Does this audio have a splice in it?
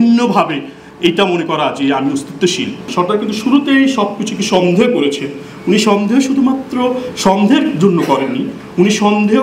yes; 1 cut; at 2.9 s

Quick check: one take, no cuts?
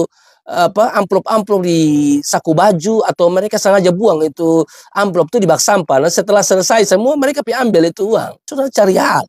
yes; 0 cuts

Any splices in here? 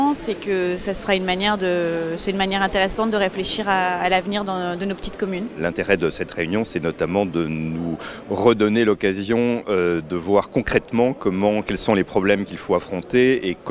no; 0 cuts

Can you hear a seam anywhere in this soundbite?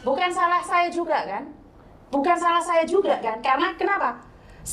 no; 0 cuts

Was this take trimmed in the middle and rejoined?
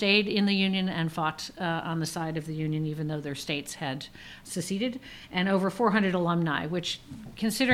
yes; 1 cut; at 4.4 s

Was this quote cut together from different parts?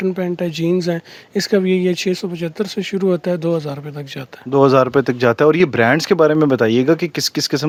no; 0 cuts

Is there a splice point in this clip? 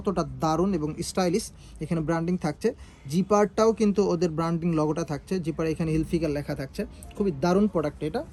no; 0 cuts

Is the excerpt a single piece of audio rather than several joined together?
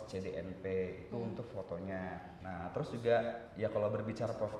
no; 1 cut; at 2.3 s

